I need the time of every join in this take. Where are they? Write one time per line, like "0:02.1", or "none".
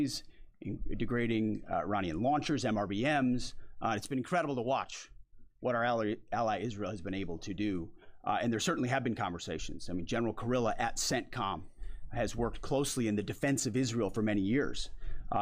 0:05.8